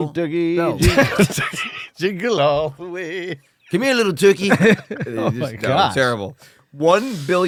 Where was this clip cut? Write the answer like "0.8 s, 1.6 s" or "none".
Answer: none